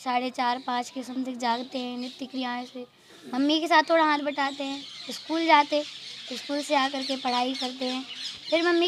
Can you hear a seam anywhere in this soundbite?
no; 0 cuts

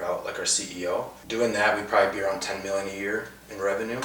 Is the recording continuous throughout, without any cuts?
no; 1 cut; at 1.2 s

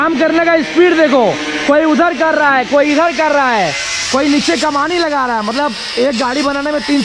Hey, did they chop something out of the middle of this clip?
no; 0 cuts

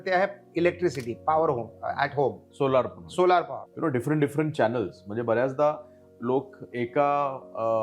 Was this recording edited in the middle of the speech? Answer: yes; 1 cut; at 3.6 s

